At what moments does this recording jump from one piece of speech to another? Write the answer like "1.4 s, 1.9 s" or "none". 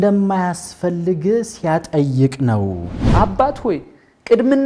3.0 s